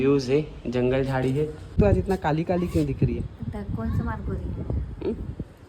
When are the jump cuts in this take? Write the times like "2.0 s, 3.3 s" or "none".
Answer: 1.8 s